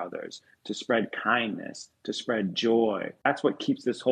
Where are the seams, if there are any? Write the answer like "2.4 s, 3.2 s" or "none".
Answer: 3.2 s